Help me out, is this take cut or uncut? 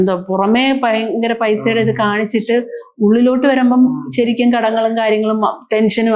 uncut